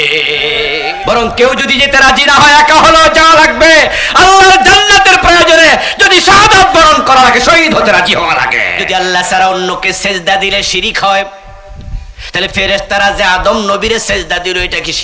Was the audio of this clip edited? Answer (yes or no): yes